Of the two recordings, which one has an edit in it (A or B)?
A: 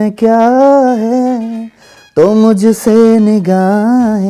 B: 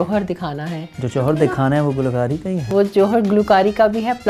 B